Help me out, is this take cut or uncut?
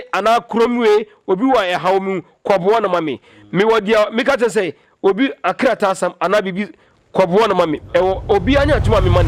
uncut